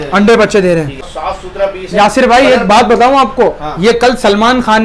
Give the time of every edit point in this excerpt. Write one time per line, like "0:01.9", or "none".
0:01.1